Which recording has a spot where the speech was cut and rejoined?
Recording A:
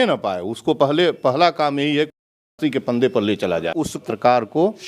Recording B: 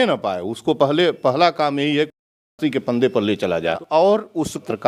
A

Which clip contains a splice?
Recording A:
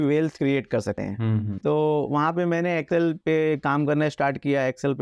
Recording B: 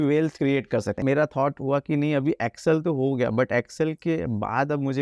B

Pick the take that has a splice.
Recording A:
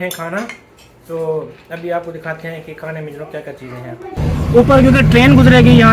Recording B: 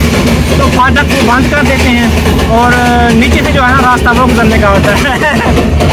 A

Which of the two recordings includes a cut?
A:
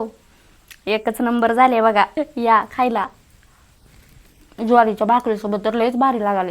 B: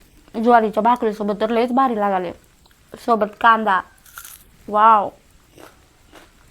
A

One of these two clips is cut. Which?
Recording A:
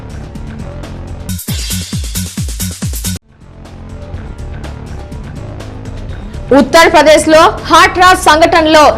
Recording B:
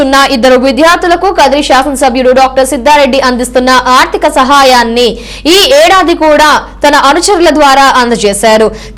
A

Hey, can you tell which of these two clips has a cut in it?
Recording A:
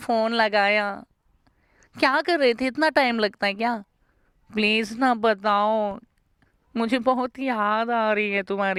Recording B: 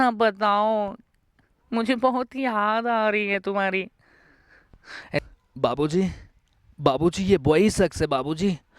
B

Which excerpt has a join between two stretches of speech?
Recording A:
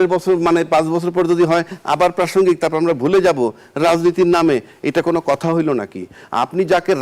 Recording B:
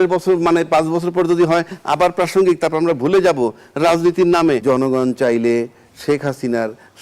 B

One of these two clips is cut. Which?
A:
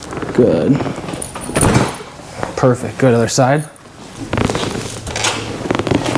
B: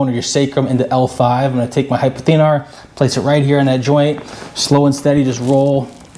A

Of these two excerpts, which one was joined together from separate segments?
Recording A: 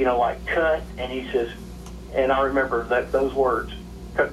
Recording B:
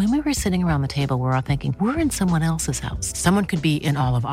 A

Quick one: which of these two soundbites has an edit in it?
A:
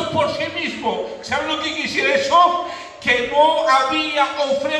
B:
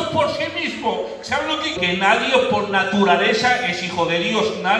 A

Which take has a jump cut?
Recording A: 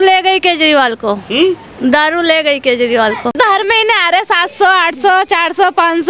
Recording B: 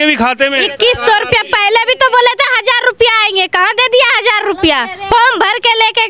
A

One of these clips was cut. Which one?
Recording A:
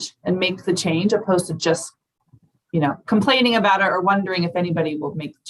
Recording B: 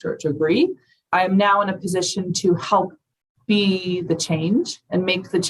B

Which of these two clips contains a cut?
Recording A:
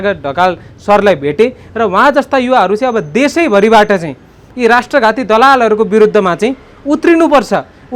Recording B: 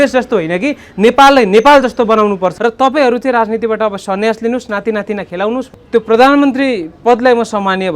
B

